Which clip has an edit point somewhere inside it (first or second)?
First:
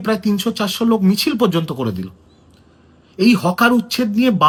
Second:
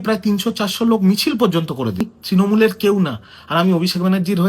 second